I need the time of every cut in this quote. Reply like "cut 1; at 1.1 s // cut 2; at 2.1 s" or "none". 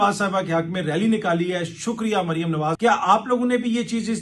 cut 1; at 2.7 s